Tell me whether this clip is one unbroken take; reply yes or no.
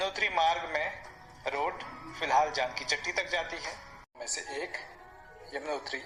yes